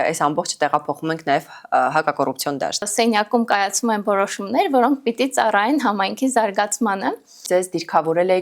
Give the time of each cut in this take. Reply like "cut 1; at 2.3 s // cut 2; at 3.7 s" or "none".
cut 1; at 2.9 s // cut 2; at 7.4 s